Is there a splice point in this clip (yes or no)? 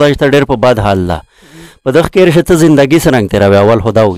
no